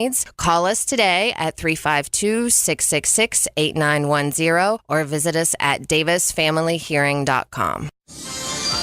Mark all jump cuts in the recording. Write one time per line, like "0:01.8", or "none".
0:07.9